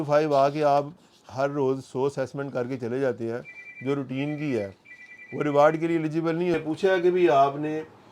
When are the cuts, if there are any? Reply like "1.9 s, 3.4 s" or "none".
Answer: 6.5 s